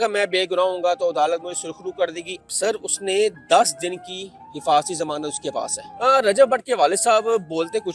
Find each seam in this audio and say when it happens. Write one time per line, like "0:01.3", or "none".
0:02.3
0:05.8